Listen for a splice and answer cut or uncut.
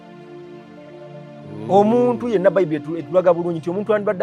cut